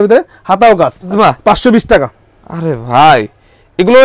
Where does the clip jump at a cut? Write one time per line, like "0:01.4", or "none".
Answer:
0:01.1

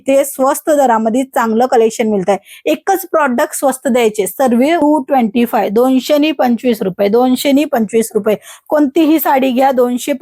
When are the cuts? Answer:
0:04.8

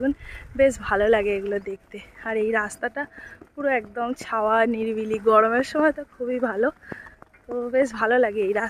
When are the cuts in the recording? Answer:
none

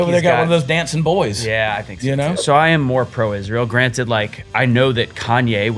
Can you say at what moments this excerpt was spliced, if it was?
0:02.4

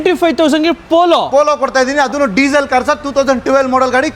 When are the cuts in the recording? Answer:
none

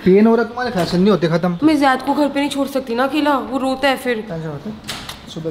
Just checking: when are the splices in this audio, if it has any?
0:01.6
0:04.3

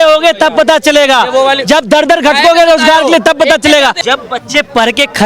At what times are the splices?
0:04.0

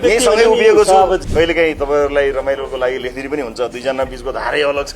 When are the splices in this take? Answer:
0:01.2

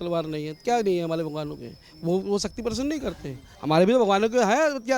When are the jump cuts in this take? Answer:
none

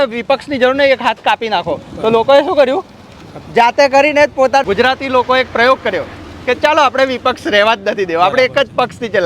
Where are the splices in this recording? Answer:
0:04.6

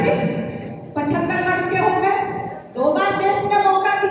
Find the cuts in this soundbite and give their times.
none

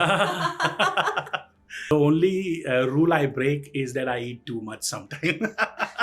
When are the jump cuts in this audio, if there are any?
0:01.9

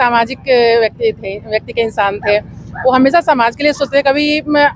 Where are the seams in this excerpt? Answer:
none

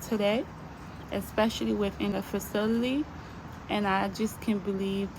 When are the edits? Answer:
0:02.1

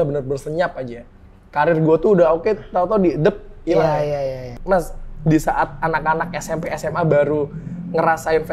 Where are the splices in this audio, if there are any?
0:04.6

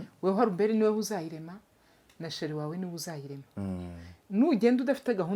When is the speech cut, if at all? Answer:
none

